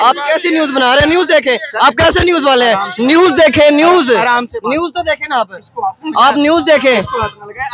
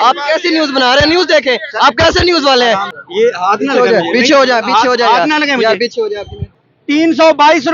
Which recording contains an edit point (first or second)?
second